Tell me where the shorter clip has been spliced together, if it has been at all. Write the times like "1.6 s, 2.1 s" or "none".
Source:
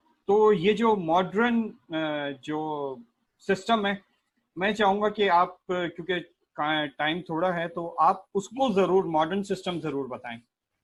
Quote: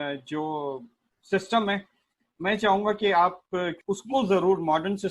3.8 s